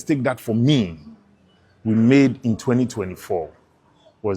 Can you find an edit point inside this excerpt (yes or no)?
no